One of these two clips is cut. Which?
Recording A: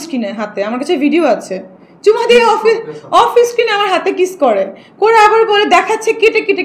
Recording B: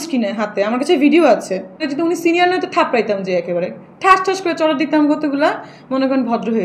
B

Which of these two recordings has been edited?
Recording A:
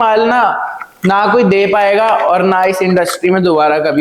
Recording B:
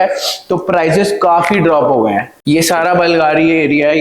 B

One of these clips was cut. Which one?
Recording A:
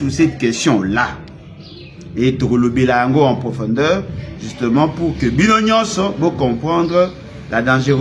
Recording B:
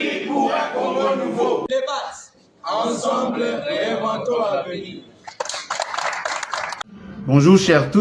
B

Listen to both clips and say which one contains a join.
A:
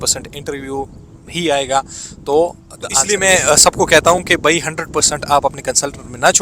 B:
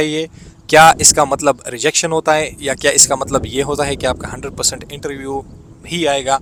A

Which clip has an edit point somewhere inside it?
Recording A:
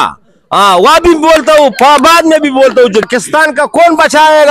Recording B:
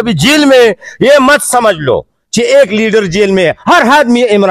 A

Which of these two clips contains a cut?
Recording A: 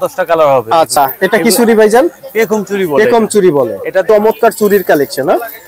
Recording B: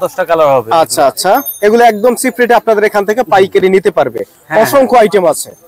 A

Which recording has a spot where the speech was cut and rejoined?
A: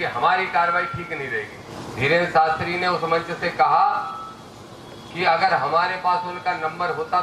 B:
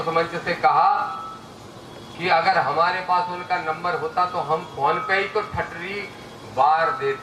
A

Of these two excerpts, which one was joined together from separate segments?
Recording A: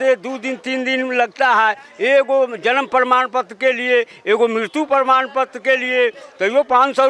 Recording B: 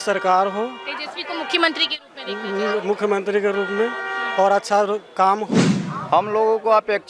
B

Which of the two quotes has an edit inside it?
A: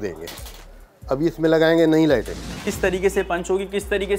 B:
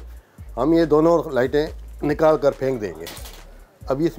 A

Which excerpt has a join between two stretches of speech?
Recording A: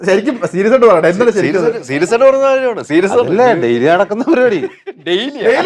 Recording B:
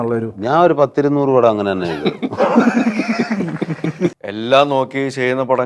B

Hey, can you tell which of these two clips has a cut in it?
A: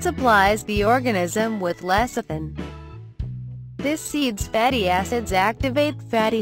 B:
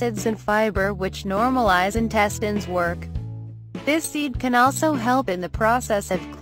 B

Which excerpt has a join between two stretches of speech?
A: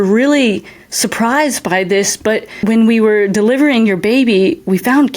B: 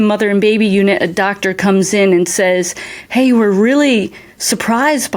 A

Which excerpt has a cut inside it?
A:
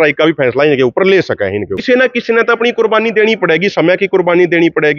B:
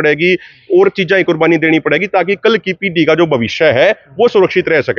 A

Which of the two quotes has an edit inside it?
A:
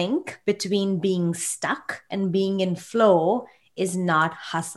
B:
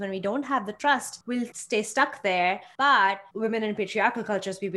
B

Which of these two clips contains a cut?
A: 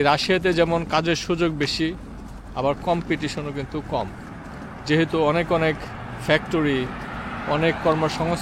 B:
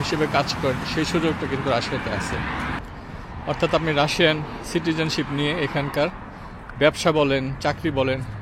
B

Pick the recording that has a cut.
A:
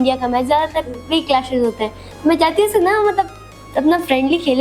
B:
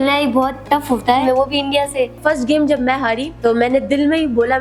B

